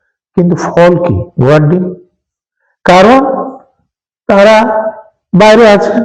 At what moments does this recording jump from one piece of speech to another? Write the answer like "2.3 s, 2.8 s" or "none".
none